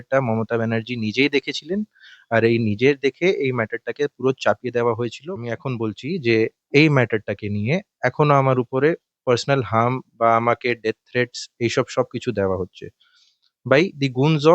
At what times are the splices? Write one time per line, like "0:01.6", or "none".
0:05.3